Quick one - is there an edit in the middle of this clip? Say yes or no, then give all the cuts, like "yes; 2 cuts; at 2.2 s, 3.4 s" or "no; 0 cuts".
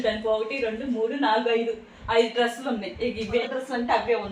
yes; 1 cut; at 3.4 s